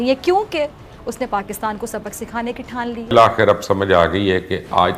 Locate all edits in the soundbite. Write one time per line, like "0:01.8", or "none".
0:03.1